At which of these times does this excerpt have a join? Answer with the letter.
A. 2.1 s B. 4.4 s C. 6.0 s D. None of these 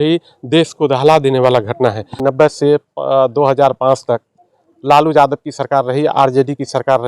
A